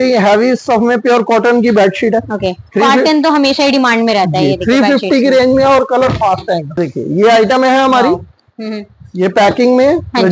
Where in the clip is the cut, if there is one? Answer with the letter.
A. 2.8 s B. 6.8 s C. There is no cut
B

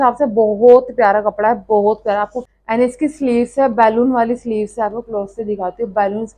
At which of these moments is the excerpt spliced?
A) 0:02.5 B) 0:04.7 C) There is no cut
A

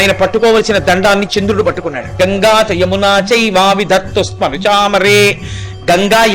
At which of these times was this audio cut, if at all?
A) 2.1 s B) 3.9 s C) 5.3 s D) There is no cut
A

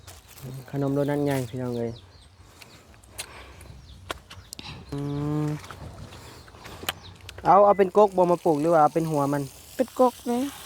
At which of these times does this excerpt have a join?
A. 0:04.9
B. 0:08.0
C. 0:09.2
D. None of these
A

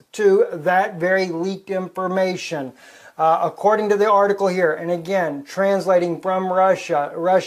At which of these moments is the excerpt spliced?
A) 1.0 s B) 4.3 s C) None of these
B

